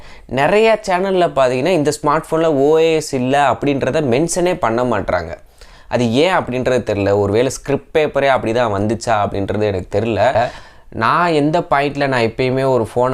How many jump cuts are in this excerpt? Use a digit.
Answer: 1